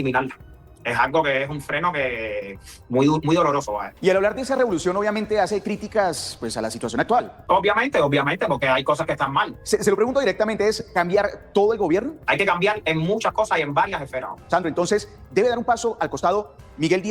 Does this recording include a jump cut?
yes; 5 cuts; at 3.9 s, 7.4 s, 9.6 s, 12.2 s, 14.4 s

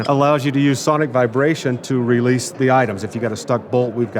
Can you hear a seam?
yes; 1 cut; at 2.5 s

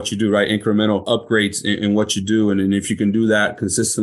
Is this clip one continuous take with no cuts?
no; 1 cut; at 1.0 s

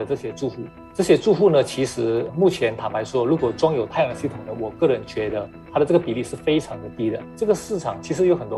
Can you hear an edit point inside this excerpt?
yes; 1 cut; at 7.3 s

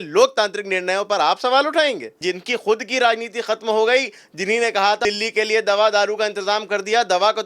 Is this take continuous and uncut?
no; 2 cuts; at 2.3 s, 5.0 s

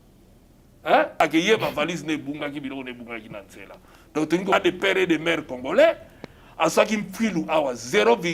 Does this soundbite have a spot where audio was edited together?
yes; 2 cuts; at 1.2 s, 4.5 s

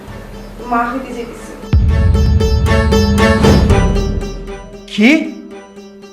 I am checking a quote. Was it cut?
no; 0 cuts

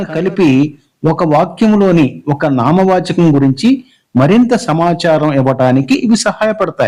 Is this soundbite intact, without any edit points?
yes; 0 cuts

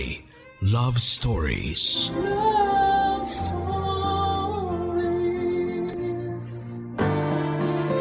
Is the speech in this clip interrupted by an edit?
yes; 1 cut; at 6.9 s

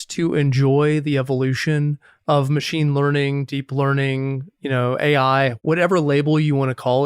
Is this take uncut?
no; 1 cut; at 5.6 s

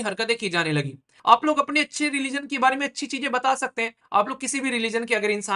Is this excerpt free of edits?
no; 1 cut; at 1.1 s

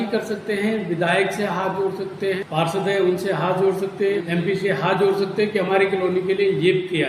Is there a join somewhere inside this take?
yes; 2 cuts; at 2.4 s, 4.2 s

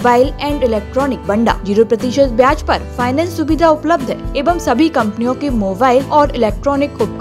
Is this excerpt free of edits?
no; 3 cuts; at 1.3 s, 4.3 s, 6.1 s

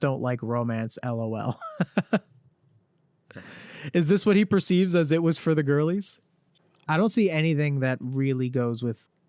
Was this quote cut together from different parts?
no; 0 cuts

